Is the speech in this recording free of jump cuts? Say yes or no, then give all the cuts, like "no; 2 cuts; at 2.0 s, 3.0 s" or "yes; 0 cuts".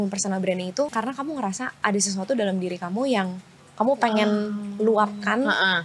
no; 1 cut; at 0.9 s